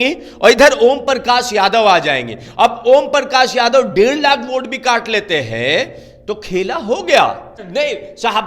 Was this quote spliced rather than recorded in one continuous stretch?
yes; 1 cut; at 7.5 s

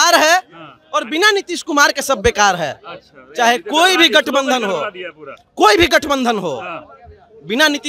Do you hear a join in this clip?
no; 0 cuts

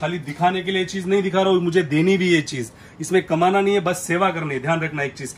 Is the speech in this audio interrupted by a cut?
no; 0 cuts

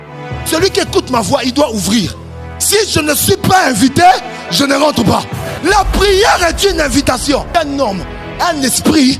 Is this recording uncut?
no; 2 cuts; at 5.4 s, 7.5 s

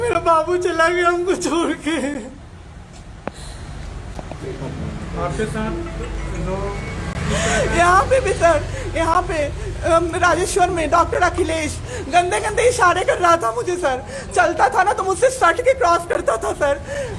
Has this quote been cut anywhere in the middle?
no; 0 cuts

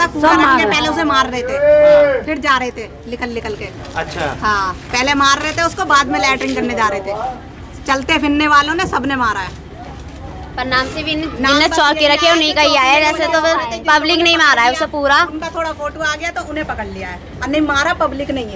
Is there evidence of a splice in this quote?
no; 0 cuts

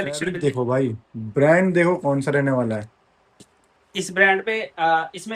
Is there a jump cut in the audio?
no; 0 cuts

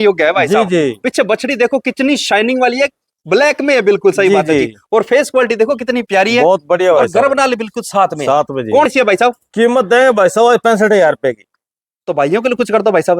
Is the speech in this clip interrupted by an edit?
yes; 1 cut; at 8.9 s

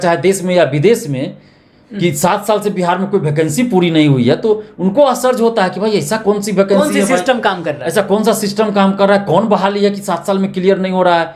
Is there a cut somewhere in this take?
no; 0 cuts

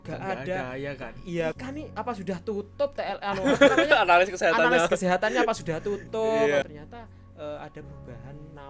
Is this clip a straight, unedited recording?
no; 2 cuts; at 1.6 s, 6.6 s

